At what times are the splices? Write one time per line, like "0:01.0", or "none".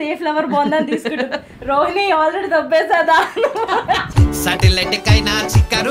none